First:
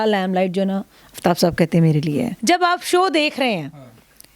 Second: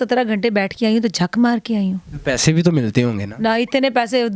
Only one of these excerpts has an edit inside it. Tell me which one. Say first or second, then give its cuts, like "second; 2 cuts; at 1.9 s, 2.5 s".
first; 1 cut; at 2.3 s